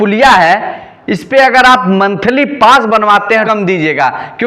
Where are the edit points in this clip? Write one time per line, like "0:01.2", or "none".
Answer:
0:03.5